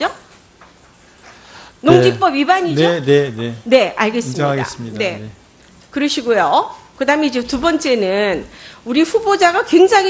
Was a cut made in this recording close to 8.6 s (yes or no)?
yes